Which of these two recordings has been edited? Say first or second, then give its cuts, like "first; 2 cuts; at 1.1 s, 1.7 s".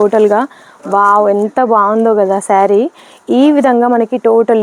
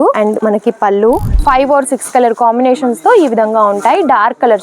second; 1 cut; at 1.4 s